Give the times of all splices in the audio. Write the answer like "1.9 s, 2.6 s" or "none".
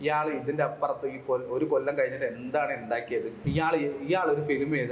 3.4 s